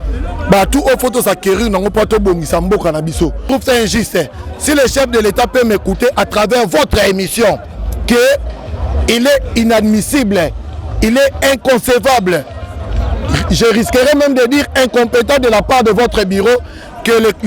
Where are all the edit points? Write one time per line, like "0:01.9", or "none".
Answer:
0:03.4